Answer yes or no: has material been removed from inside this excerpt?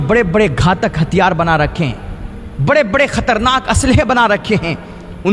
no